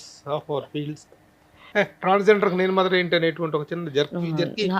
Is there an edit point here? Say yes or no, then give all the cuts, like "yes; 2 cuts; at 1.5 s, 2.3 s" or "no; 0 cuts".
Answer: yes; 1 cut; at 1.6 s